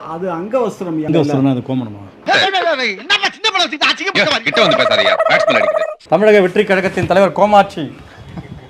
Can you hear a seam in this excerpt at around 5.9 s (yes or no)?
yes